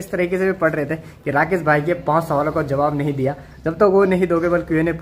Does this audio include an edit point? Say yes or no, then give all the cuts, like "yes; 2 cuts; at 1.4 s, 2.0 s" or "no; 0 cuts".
no; 0 cuts